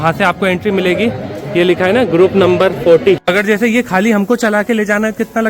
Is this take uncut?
no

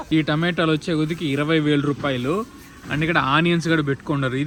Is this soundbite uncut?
yes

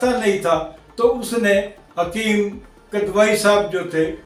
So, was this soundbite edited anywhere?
no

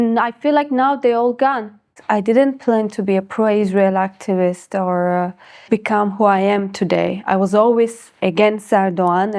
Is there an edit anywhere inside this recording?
yes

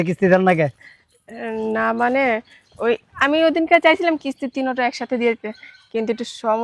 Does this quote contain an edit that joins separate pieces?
no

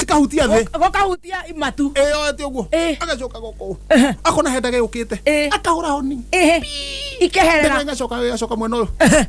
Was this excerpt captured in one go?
yes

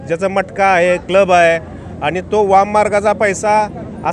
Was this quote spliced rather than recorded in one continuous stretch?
no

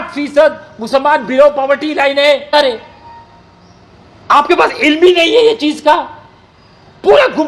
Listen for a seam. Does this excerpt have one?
yes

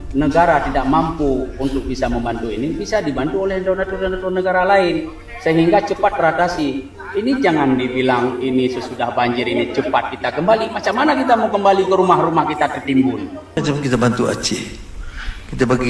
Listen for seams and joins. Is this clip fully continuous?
no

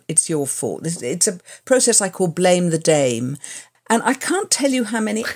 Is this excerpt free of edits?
no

